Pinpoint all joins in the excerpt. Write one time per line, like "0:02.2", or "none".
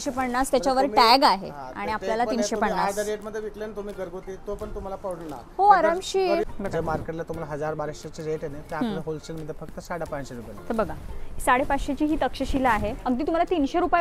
0:06.5